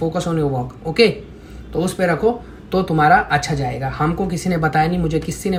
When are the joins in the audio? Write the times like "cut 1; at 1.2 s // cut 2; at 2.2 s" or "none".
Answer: none